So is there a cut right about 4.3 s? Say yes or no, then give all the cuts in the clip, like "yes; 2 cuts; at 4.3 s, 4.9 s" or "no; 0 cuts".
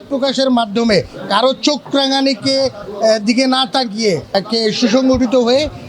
yes; 1 cut; at 4.3 s